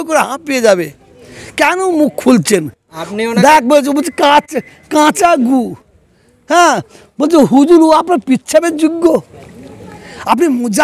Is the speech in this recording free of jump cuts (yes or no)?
yes